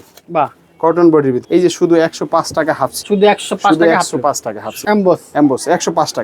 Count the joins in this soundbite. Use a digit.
3